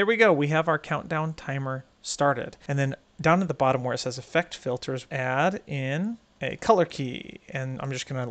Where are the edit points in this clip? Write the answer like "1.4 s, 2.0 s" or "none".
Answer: 2.6 s, 5.1 s, 6.3 s